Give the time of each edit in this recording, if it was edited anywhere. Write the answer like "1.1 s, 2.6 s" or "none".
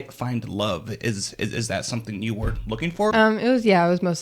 3.1 s

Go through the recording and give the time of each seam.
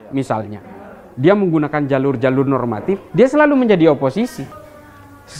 none

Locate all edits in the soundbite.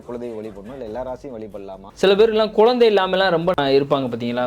1.9 s, 3.6 s

